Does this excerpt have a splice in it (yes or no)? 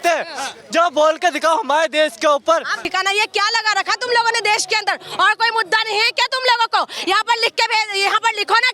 yes